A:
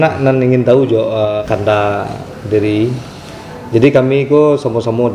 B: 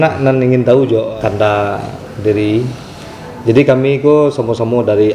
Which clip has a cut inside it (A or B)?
B